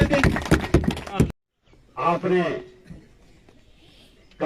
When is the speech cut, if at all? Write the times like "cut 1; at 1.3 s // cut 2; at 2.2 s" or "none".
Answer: cut 1; at 1.2 s